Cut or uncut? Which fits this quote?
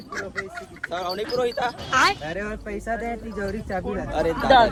uncut